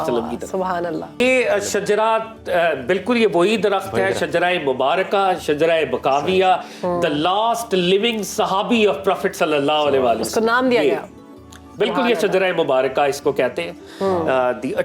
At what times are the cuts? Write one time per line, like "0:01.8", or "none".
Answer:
0:01.2